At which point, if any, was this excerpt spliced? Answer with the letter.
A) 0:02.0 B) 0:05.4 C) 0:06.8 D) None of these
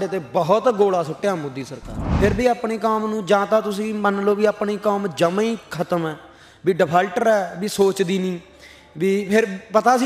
A